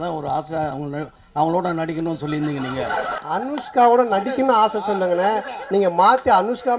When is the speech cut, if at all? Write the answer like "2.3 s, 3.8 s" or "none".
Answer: 3.2 s